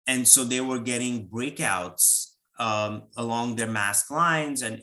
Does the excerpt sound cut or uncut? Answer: uncut